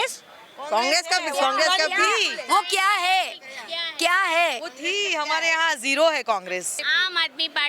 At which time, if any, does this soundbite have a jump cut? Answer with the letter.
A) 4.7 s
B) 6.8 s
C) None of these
B